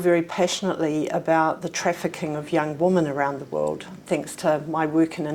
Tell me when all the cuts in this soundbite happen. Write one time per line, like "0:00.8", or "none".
none